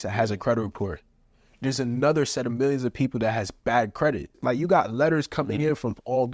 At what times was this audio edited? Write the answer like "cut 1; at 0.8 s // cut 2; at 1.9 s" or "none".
cut 1; at 4.4 s

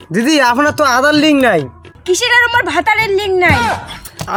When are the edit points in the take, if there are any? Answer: none

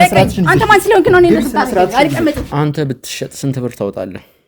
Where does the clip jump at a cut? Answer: cut 1; at 2.5 s

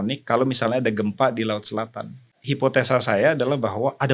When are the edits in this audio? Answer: cut 1; at 2.4 s

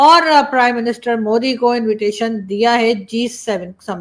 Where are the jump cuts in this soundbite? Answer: none

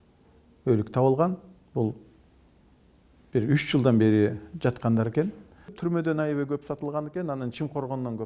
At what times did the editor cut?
cut 1; at 5.8 s

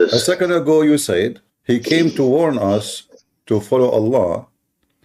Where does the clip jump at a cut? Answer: cut 1; at 1.5 s

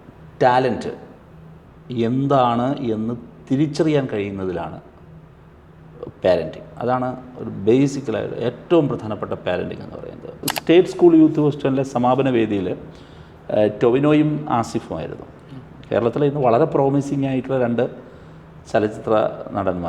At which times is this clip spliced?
cut 1; at 10.4 s

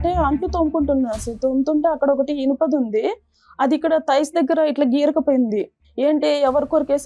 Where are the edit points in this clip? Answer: cut 1; at 5.8 s

